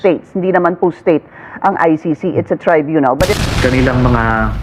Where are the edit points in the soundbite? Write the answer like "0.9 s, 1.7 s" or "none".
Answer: 3.3 s